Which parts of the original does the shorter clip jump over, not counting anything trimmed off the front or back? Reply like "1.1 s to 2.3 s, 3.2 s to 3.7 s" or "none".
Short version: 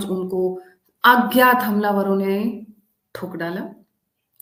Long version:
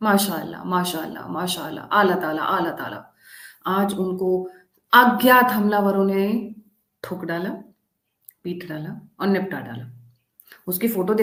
none